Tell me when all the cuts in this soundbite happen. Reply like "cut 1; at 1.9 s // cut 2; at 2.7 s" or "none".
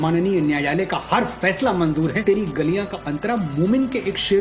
cut 1; at 2.2 s